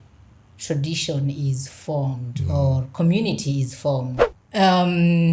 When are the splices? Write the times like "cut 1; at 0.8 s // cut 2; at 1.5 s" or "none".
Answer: cut 1; at 4.2 s